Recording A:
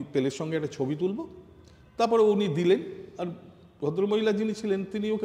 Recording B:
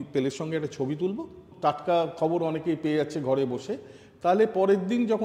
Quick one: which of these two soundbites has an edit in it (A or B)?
B